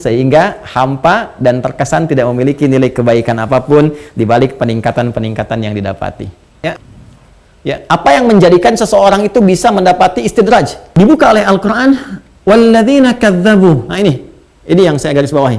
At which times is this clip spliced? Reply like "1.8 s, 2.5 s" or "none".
6.8 s, 10.8 s